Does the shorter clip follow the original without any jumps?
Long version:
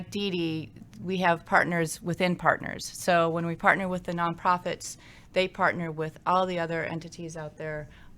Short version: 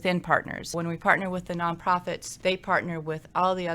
no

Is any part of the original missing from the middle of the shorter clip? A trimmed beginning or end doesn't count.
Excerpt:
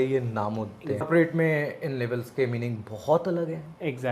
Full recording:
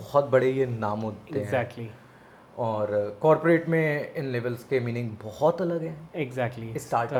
yes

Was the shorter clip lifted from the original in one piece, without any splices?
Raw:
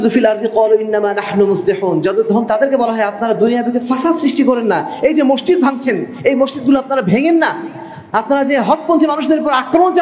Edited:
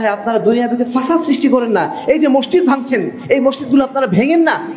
yes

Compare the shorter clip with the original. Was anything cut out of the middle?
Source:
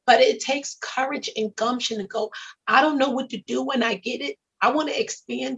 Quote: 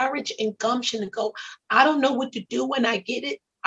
no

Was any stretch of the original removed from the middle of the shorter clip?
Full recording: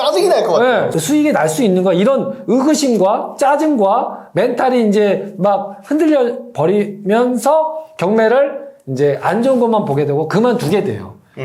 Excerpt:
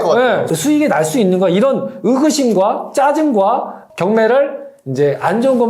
yes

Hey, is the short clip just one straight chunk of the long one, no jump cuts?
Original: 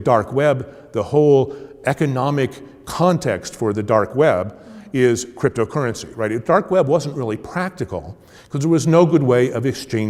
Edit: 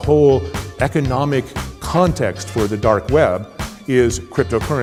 yes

